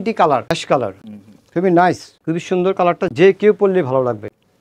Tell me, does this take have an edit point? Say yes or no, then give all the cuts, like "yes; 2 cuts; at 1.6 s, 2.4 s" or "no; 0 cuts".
no; 0 cuts